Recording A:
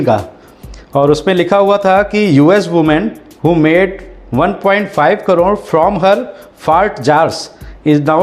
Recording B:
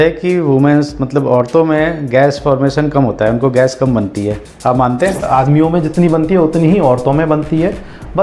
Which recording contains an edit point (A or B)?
B